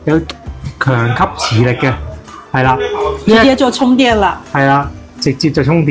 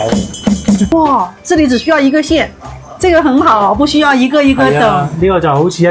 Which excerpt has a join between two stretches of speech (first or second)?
second